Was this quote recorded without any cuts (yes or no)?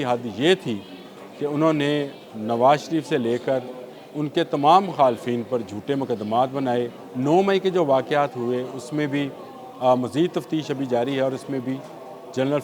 no